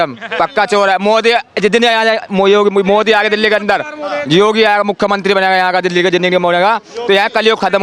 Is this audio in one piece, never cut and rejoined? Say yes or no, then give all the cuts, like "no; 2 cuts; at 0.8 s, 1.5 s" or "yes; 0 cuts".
yes; 0 cuts